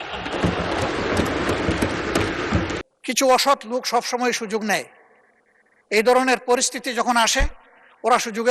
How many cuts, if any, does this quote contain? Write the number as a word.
one